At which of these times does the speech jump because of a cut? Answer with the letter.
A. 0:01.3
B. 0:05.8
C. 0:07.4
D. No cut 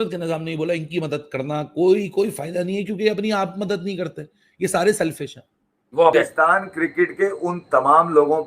B